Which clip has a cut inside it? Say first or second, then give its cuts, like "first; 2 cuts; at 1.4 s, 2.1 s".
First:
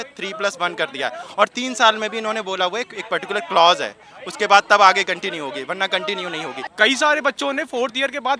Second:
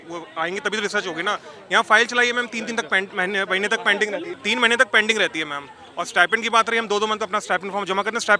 first; 1 cut; at 6.6 s